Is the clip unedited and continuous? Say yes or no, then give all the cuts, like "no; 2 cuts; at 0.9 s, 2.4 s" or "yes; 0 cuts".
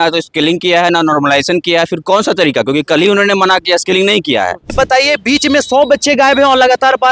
no; 1 cut; at 4.7 s